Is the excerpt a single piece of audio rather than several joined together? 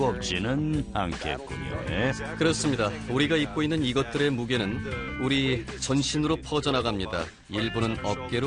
yes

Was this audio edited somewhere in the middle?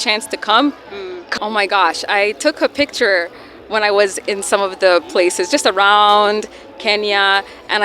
yes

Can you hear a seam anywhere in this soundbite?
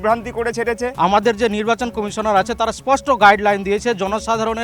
yes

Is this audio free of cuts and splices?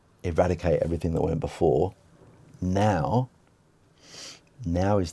yes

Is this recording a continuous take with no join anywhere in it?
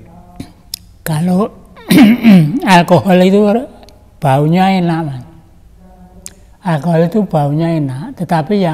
yes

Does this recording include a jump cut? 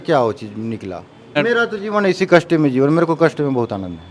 yes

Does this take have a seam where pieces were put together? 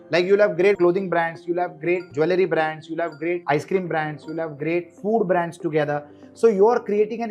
yes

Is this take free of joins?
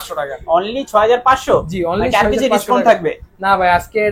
yes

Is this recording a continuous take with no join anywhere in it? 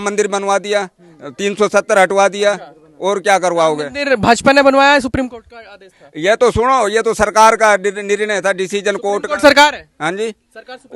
yes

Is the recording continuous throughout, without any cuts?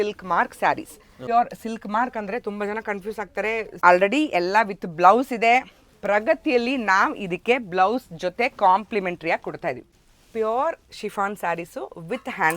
no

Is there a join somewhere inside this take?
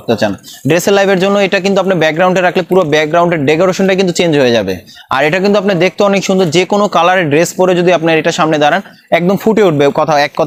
no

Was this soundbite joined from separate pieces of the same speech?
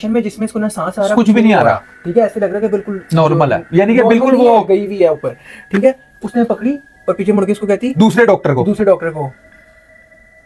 no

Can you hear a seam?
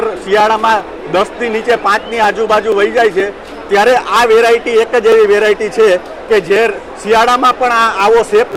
no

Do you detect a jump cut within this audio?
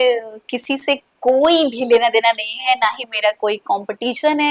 no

